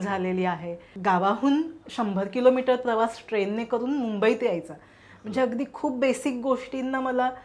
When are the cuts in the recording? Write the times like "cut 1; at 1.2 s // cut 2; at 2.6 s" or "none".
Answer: cut 1; at 0.9 s